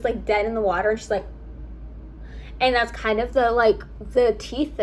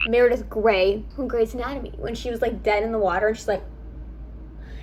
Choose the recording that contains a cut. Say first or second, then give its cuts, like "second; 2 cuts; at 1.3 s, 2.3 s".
second; 1 cut; at 1.1 s